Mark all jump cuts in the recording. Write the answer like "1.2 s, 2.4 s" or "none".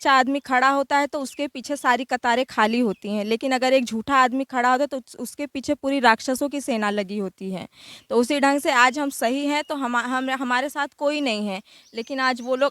none